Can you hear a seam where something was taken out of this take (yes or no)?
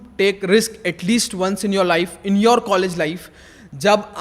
no